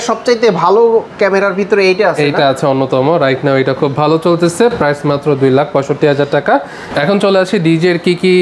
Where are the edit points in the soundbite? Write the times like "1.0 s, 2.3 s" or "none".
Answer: none